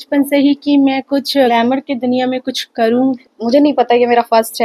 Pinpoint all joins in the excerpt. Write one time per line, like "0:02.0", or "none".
0:01.5
0:03.2